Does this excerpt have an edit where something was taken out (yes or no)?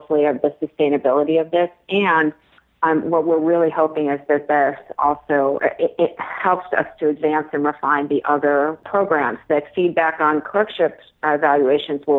yes